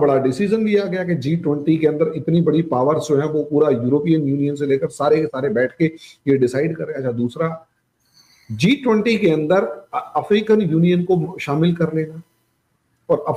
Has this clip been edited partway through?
no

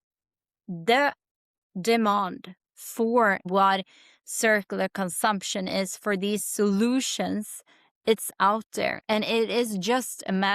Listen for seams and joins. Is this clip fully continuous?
no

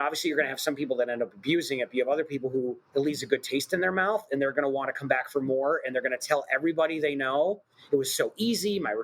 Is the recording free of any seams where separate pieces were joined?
no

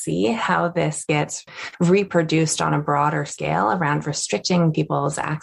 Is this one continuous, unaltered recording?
yes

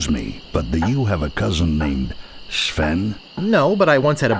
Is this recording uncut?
yes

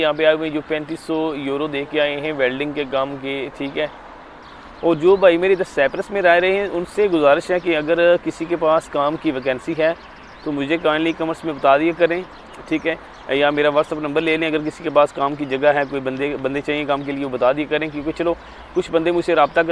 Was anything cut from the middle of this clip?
yes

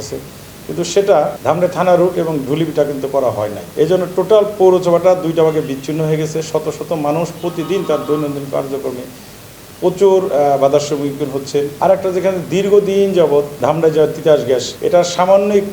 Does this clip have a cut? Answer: yes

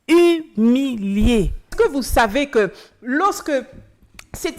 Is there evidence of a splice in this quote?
yes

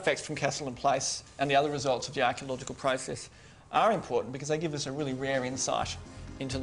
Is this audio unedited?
yes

